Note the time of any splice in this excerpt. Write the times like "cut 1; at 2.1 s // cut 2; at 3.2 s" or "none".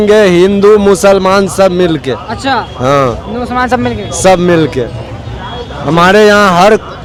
none

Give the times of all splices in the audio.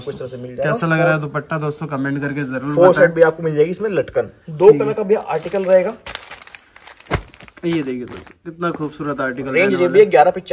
none

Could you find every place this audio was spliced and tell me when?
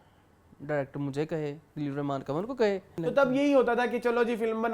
cut 1; at 2.9 s

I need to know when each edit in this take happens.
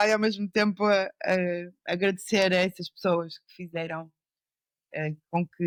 none

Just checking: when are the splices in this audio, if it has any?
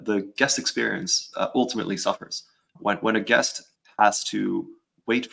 cut 1; at 2.7 s // cut 2; at 3.7 s

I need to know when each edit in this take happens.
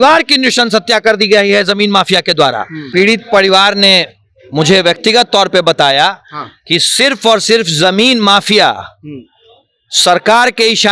cut 1; at 2.8 s

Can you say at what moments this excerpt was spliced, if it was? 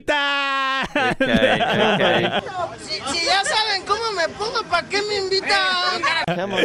none

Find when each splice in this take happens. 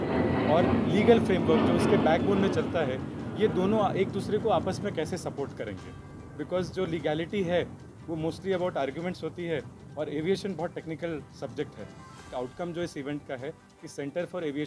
cut 1; at 12.2 s

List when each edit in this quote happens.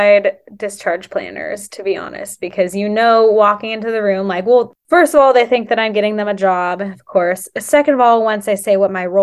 cut 1; at 4.7 s

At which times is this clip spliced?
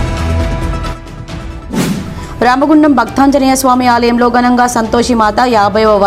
cut 1; at 1.0 s

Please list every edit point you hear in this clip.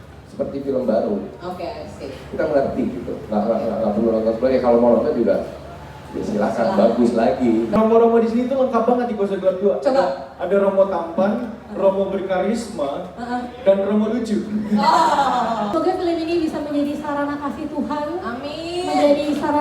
cut 1; at 7.7 s // cut 2; at 15.7 s

